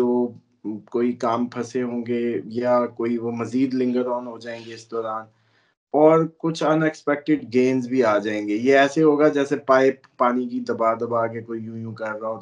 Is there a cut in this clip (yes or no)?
no